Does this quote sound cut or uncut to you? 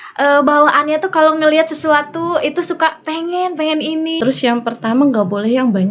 cut